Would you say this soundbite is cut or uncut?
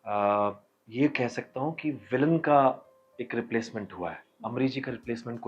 uncut